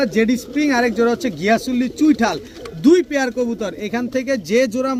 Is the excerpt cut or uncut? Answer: uncut